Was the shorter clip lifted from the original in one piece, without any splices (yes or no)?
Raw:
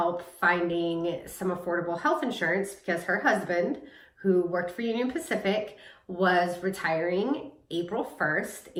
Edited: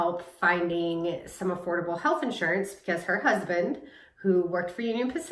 yes